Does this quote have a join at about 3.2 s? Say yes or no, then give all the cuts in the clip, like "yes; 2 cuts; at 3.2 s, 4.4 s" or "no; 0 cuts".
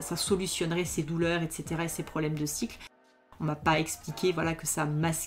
yes; 1 cut; at 3.2 s